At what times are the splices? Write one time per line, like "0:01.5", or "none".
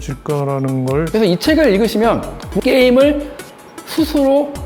0:01.1
0:02.5